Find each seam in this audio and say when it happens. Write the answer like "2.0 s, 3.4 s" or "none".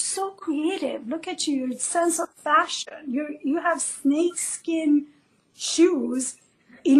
none